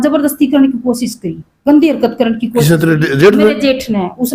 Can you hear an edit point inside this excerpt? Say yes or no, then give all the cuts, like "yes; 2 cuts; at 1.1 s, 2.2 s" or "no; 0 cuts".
no; 0 cuts